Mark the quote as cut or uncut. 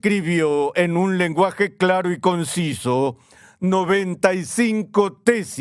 uncut